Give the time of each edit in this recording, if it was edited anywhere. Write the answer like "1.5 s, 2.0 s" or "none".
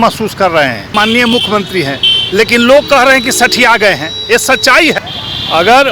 0.9 s, 5.0 s